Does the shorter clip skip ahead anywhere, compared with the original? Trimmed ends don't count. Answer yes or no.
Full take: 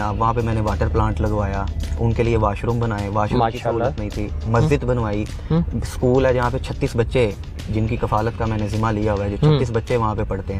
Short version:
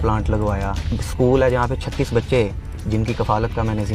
yes